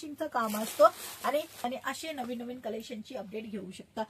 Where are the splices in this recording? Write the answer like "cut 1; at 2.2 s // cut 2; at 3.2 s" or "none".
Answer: cut 1; at 1.6 s